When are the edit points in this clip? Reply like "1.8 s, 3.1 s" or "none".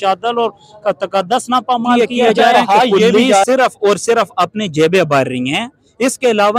3.4 s